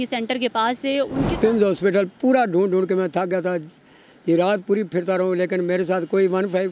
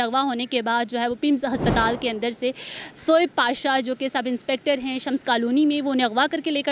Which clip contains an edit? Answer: first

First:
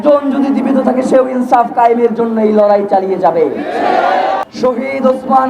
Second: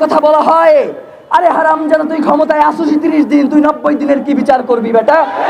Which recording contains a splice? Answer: first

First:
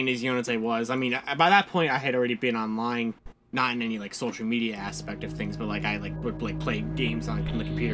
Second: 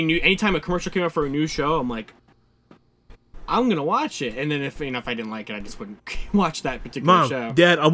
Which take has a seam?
second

